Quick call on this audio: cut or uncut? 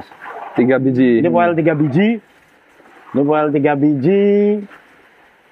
uncut